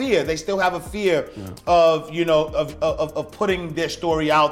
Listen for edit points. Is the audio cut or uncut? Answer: uncut